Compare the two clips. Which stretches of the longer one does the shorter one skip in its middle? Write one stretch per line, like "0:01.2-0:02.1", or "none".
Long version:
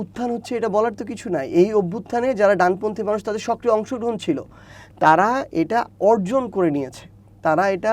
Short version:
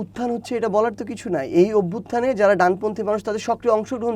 none